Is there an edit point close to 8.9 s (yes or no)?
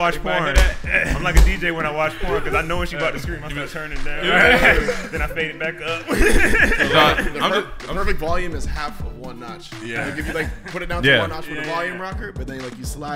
no